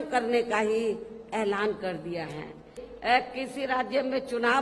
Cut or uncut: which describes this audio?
cut